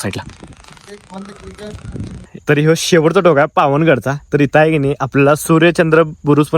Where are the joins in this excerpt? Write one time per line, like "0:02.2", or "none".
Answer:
0:02.3

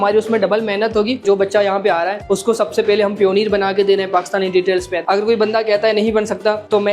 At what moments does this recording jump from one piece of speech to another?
0:01.2
0:04.9

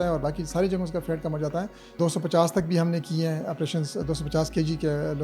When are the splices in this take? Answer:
0:01.8

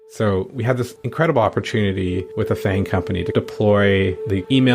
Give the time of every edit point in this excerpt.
0:01.0
0:02.3

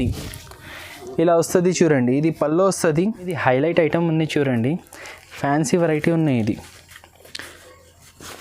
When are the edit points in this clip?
0:03.3

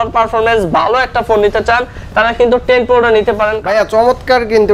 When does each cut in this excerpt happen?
0:03.6

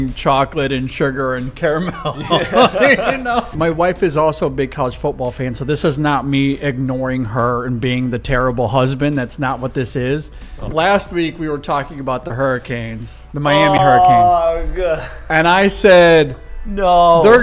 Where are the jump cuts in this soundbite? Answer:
0:03.5
0:10.6

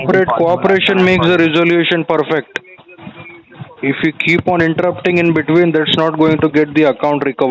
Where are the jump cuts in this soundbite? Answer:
none

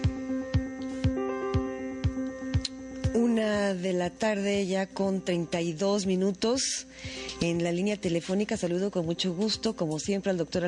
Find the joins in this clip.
none

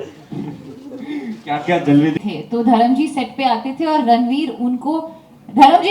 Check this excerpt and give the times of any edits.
0:02.1

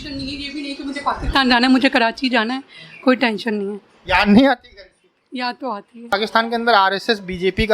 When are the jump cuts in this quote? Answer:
0:06.1

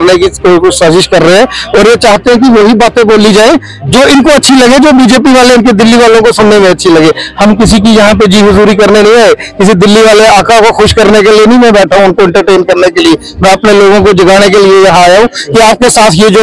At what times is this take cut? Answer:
none

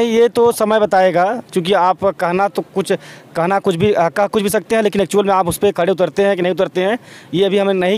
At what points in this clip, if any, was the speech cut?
none

